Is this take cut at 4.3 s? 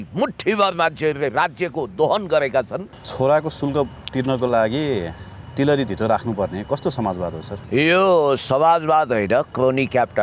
no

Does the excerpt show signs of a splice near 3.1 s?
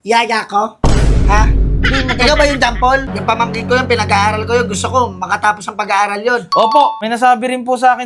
yes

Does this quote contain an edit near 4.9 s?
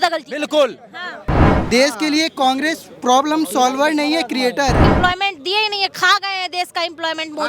yes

